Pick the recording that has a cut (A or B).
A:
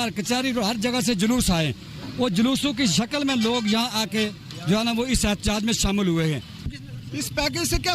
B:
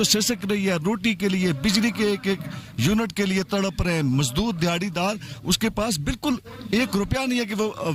A